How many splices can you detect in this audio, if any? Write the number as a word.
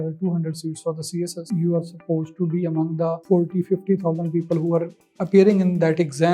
two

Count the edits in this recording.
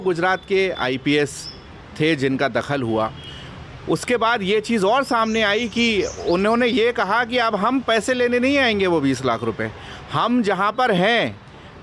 zero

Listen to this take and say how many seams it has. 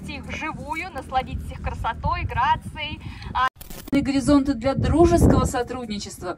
one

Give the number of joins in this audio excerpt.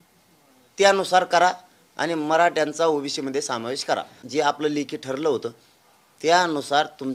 one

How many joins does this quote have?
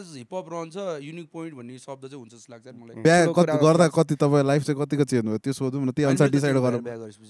one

